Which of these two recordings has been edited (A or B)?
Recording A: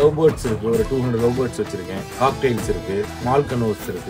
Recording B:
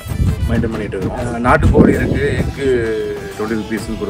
B